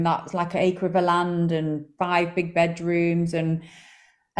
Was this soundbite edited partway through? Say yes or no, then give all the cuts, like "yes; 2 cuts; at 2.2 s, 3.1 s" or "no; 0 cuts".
no; 0 cuts